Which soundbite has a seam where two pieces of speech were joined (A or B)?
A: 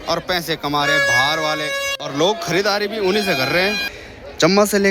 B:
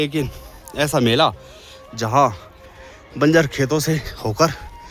A